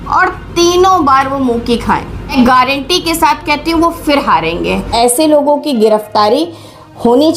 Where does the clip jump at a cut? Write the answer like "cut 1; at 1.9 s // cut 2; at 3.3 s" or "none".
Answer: cut 1; at 2.3 s // cut 2; at 4.9 s